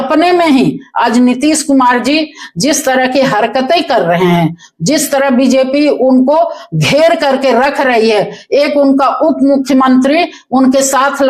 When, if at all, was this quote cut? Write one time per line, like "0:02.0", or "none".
none